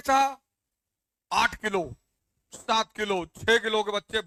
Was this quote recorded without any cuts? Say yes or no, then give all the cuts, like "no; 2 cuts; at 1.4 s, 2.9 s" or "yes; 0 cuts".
yes; 0 cuts